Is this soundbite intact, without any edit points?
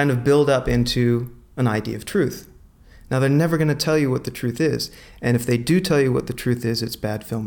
yes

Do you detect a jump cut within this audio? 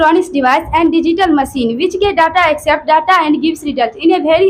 no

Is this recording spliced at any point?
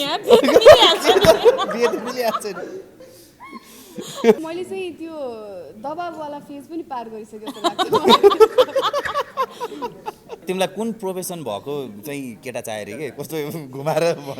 yes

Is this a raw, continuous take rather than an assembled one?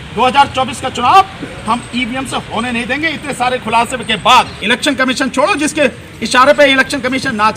no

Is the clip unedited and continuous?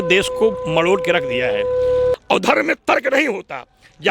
no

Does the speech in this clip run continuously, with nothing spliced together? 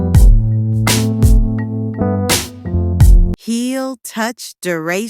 no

